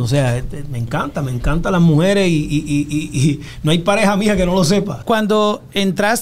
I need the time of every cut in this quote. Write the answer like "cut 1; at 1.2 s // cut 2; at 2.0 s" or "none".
cut 1; at 4.9 s